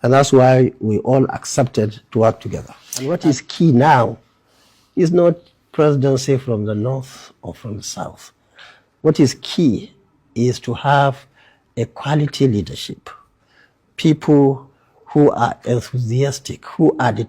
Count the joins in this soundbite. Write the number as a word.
one